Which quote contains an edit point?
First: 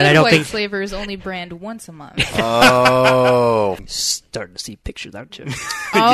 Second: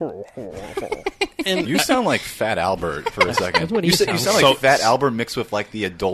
first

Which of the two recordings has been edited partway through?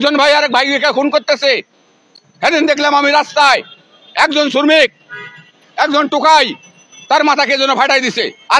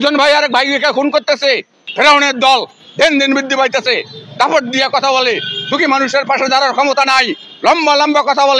second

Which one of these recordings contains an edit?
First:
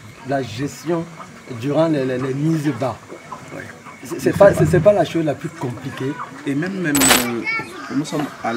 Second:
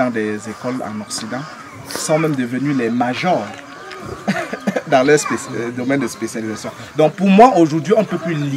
first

